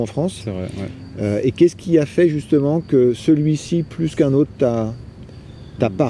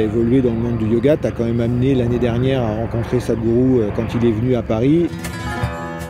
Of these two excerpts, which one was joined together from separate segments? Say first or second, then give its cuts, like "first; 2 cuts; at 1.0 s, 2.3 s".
second; 1 cut; at 5.1 s